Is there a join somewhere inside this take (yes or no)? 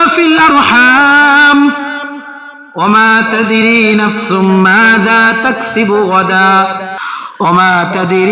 yes